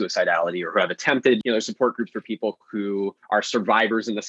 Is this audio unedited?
no; 2 cuts; at 1.4 s, 3.2 s

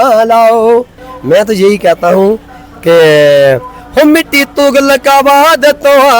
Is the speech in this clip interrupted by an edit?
yes; 1 cut; at 1.0 s

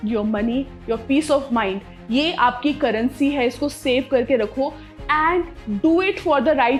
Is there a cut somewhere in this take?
no; 0 cuts

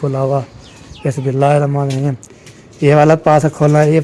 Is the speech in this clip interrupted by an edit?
no; 0 cuts

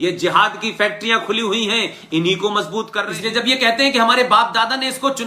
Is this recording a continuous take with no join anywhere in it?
no; 1 cut; at 3.0 s

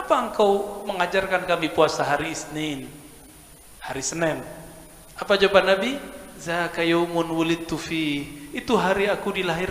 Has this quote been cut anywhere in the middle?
no; 0 cuts

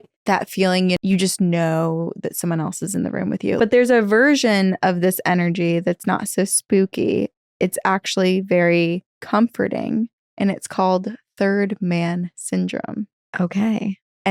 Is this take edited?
yes; 2 cuts; at 1.0 s, 3.6 s

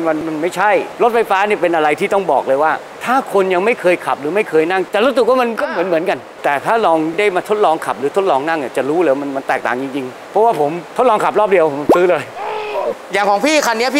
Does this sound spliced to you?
yes; 4 cuts; at 0.9 s, 4.9 s, 10.8 s, 12.9 s

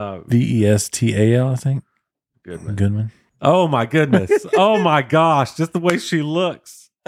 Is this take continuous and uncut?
no; 1 cut; at 3.2 s

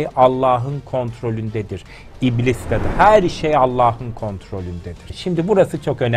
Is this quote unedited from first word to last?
no; 1 cut; at 5.1 s

